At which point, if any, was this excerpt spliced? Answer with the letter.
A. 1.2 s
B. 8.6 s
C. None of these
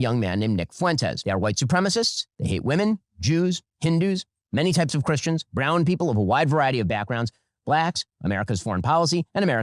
A